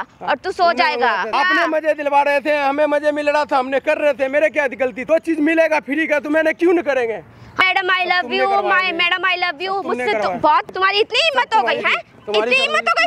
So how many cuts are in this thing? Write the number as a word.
four